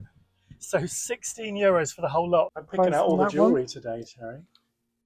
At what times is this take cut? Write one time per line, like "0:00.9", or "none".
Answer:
0:02.6